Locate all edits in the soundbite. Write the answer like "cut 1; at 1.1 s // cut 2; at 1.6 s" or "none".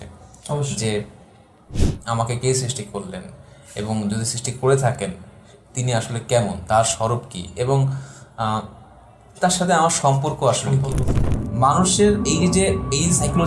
cut 1; at 11.3 s